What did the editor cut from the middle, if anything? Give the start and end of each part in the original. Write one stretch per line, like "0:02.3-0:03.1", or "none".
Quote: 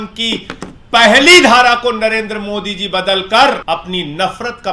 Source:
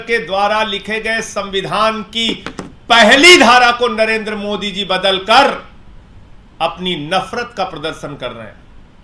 0:05.6-0:06.5